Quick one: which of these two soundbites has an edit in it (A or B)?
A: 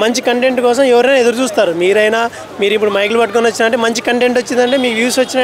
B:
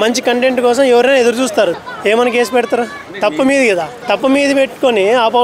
B